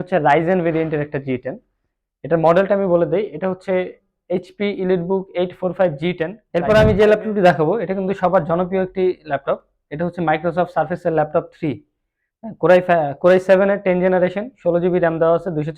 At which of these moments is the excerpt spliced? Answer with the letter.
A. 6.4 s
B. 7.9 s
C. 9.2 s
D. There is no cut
A